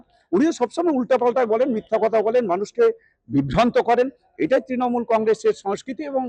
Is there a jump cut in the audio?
no; 0 cuts

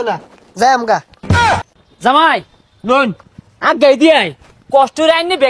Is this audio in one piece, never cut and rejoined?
yes; 0 cuts

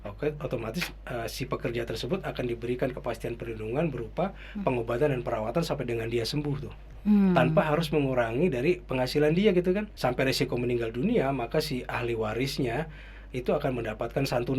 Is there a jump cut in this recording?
yes; 1 cut; at 9.9 s

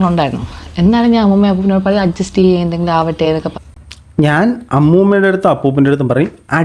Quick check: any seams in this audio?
no; 0 cuts

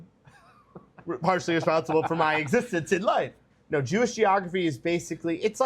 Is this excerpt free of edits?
no; 1 cut; at 3.4 s

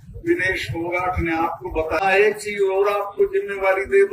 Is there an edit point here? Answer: yes; 1 cut; at 2.0 s

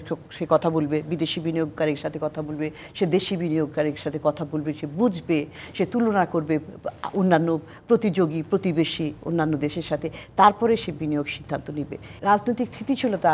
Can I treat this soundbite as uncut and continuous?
no; 1 cut; at 12.1 s

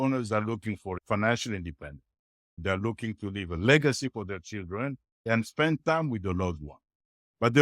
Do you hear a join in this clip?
yes; 1 cut; at 1.0 s

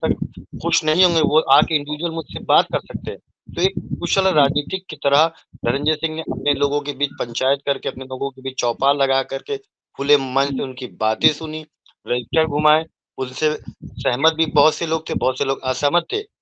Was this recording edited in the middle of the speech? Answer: no; 0 cuts

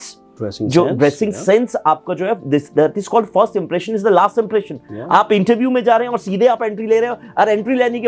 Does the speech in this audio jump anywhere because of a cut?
no; 0 cuts

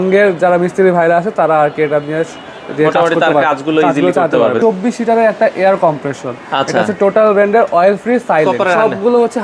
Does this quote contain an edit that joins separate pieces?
yes; 2 cuts; at 4.6 s, 8.5 s

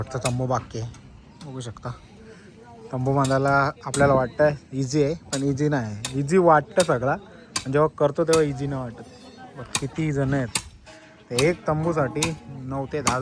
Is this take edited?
no; 0 cuts

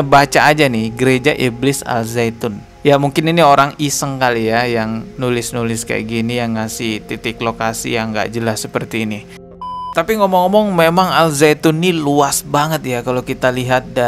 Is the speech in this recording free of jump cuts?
no; 1 cut; at 9.9 s

